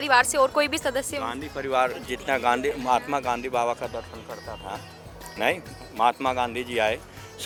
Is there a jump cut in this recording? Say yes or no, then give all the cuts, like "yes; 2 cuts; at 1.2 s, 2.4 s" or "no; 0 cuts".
no; 0 cuts